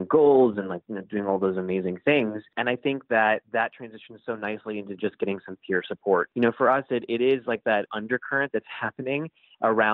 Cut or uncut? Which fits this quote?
cut